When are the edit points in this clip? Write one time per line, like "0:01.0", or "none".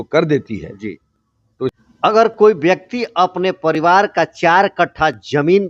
0:01.7